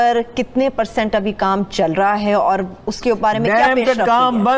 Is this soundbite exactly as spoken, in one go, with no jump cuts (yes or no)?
no